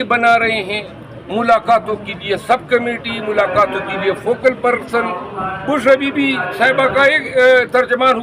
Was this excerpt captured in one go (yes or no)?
yes